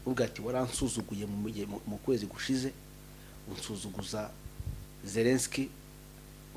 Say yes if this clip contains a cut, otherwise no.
no